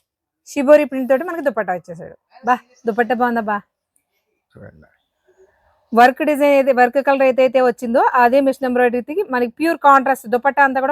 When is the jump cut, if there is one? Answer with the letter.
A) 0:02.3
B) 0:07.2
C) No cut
A